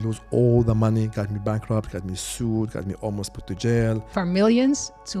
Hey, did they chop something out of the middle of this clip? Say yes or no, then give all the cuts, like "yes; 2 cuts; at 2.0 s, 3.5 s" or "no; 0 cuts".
yes; 1 cut; at 4.1 s